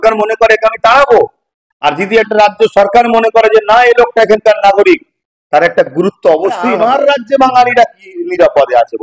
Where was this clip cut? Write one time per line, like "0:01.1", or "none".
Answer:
0:06.7